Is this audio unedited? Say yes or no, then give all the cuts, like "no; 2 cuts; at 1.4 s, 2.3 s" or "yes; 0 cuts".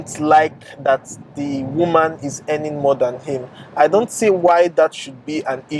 yes; 0 cuts